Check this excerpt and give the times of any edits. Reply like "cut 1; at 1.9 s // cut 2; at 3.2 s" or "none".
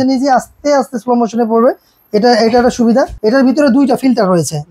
cut 1; at 3.1 s